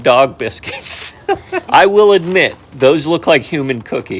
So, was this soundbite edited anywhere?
yes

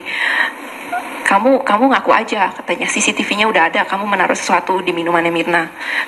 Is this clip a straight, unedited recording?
yes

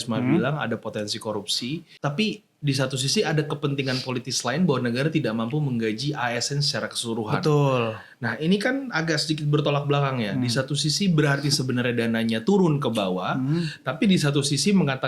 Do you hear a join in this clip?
yes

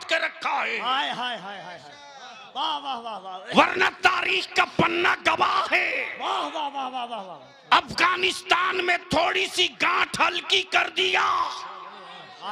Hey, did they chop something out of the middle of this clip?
no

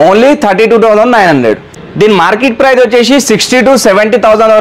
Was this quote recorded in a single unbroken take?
no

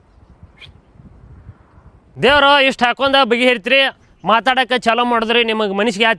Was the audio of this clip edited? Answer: no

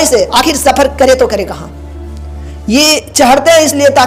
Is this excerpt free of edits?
yes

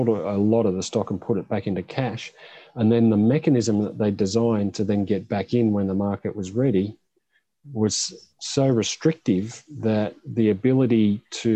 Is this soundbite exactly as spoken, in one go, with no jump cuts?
yes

